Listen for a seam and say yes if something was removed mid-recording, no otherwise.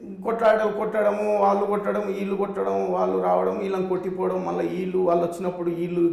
no